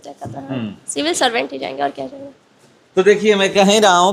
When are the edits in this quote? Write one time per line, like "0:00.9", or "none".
none